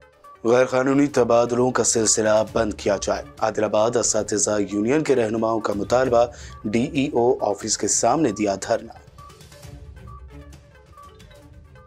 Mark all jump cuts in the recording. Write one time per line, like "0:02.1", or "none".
none